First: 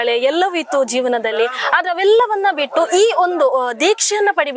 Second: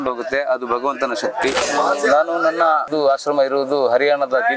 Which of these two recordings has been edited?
second; 2 cuts; at 1.6 s, 2.9 s

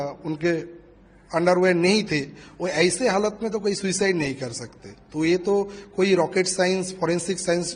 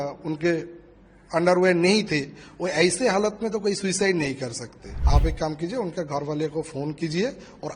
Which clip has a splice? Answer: second; 1 cut; at 4.9 s

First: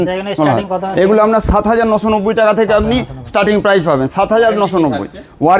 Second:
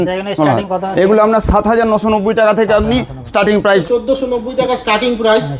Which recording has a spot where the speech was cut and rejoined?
second; 1 cut; at 3.8 s

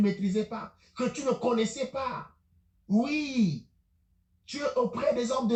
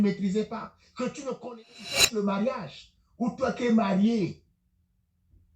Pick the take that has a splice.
second; 1 cut; at 1.7 s

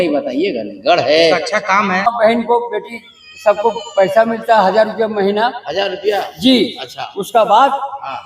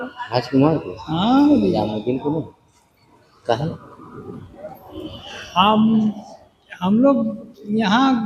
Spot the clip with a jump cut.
first; 1 cut; at 2.1 s

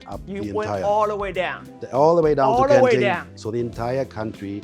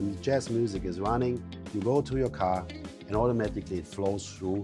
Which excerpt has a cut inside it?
first; 1 cut; at 3.2 s

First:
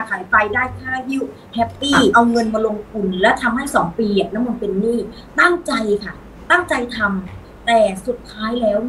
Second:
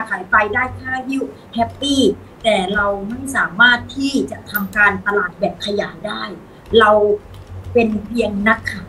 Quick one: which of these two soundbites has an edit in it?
first; 1 cut; at 2.1 s

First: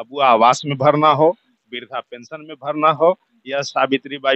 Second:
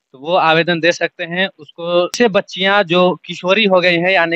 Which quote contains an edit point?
second; 1 cut; at 2.1 s

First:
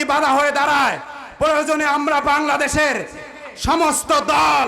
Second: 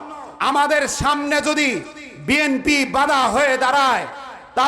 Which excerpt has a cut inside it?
first; 1 cut; at 3.3 s

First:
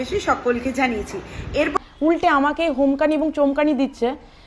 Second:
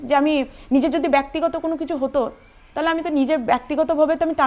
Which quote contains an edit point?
first; 1 cut; at 1.7 s

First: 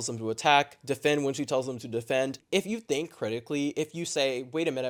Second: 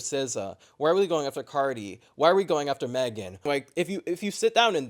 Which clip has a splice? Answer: second; 1 cut; at 3.4 s

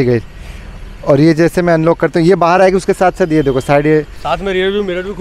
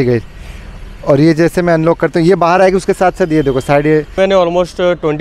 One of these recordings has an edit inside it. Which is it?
second; 1 cut; at 4.2 s

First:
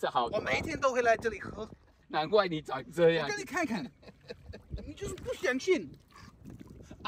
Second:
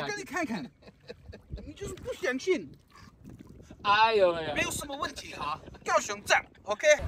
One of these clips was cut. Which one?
first; 1 cut; at 2.0 s

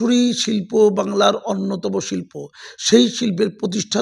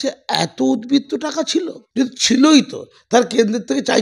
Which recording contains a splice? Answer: second; 1 cut; at 1.8 s

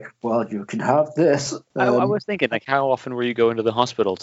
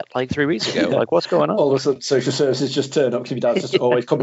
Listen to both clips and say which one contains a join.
first; 1 cut; at 1.6 s

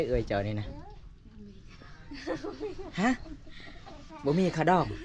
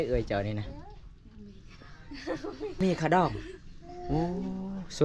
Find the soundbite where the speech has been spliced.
second; 1 cut; at 2.8 s

